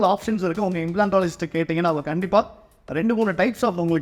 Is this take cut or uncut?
uncut